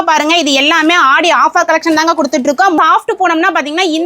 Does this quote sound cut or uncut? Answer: cut